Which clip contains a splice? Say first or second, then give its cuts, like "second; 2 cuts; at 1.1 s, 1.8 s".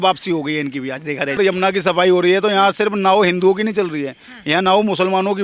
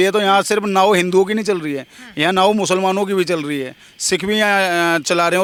first; 1 cut; at 1.4 s